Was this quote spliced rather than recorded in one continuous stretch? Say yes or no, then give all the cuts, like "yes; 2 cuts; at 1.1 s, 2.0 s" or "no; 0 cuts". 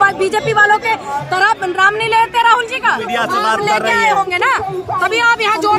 yes; 1 cut; at 3.1 s